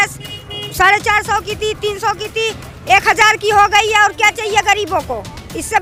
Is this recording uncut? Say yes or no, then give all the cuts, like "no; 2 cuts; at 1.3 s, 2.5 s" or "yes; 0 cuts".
yes; 0 cuts